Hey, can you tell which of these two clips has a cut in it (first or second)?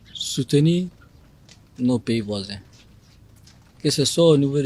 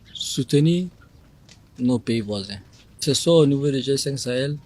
second